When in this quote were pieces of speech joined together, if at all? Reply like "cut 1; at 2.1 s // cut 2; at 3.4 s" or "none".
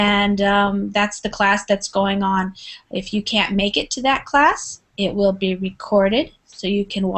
cut 1; at 2.9 s